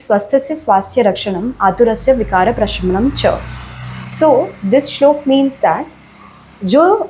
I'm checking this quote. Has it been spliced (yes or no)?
no